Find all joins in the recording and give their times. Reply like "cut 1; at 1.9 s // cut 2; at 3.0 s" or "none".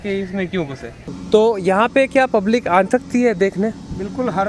cut 1; at 1.1 s

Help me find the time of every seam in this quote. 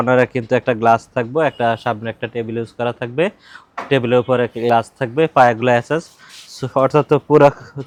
none

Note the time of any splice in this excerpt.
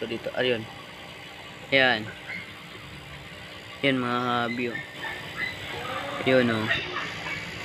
none

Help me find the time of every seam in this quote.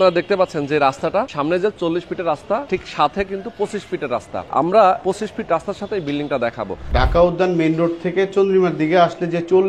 cut 1; at 1.3 s // cut 2; at 2.7 s // cut 3; at 4.5 s // cut 4; at 5.0 s // cut 5; at 6.8 s

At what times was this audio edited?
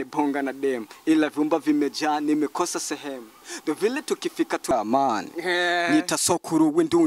cut 1; at 4.7 s

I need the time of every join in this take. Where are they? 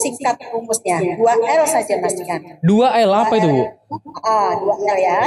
none

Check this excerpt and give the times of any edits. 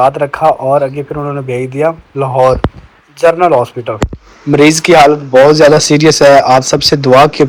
none

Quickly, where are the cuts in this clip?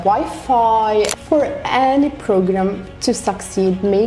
cut 1; at 1.1 s

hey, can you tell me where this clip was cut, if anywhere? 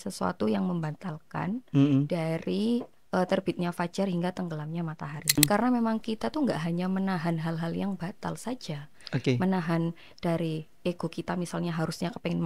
cut 1; at 5.4 s

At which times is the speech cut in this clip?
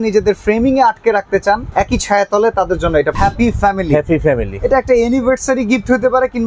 cut 1; at 1.7 s // cut 2; at 3.2 s

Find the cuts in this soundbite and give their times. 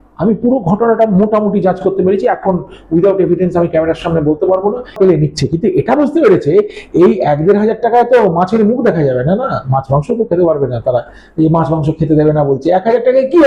cut 1; at 5.0 s

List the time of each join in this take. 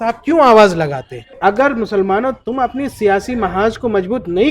cut 1; at 1.3 s

